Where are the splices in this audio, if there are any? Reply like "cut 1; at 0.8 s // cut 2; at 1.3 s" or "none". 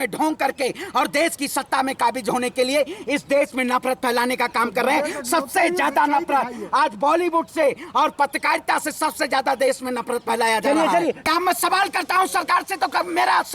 cut 1; at 11.2 s

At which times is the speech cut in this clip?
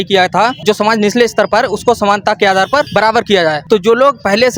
none

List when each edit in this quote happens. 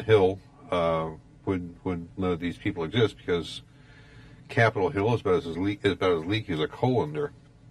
cut 1; at 3.2 s

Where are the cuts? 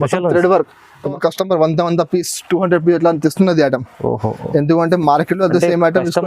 cut 1; at 1.1 s

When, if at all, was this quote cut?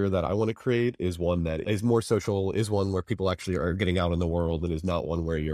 none

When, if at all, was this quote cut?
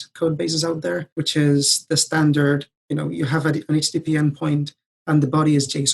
cut 1; at 1.1 s

